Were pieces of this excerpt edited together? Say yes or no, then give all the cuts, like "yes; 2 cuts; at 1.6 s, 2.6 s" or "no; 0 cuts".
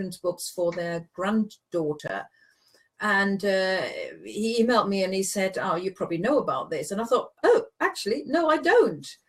yes; 1 cut; at 6.0 s